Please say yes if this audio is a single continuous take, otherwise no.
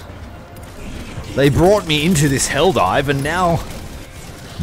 yes